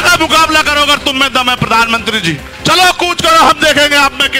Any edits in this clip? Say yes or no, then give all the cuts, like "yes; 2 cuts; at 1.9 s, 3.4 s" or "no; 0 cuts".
yes; 1 cut; at 2.5 s